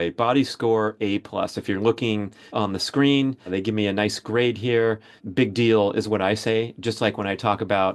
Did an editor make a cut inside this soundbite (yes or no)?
yes